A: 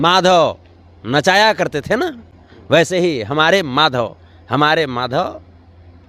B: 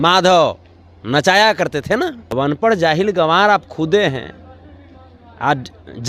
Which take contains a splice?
B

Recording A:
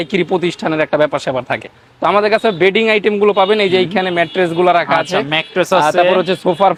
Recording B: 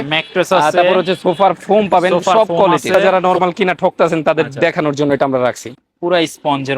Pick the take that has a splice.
B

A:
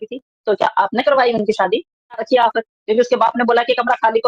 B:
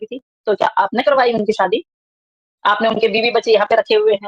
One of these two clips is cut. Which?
A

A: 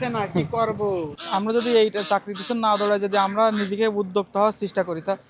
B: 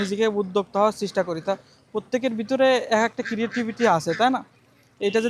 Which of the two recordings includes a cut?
A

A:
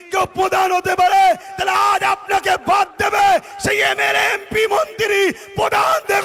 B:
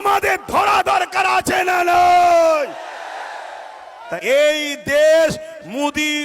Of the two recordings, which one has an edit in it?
B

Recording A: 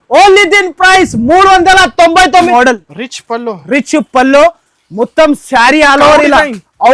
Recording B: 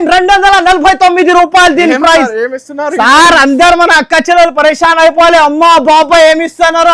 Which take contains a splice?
A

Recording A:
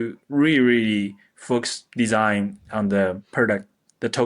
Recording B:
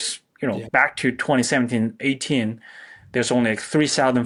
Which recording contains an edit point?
A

